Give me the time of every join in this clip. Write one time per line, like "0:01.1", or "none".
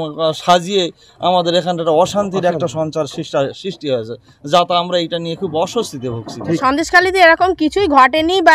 0:06.6